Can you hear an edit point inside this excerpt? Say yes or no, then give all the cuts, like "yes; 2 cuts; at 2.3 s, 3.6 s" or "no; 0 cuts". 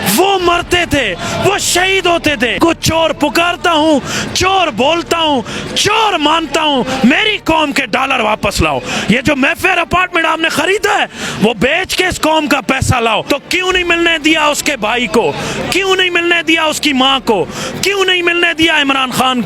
yes; 2 cuts; at 2.6 s, 13.2 s